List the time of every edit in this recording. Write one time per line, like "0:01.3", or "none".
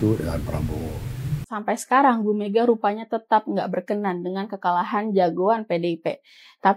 0:01.4